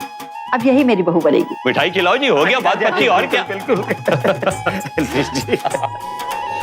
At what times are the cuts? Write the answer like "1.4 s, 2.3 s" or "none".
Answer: 1.5 s, 5.9 s